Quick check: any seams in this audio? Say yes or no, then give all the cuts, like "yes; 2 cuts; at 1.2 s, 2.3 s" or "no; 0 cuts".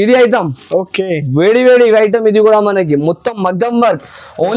no; 0 cuts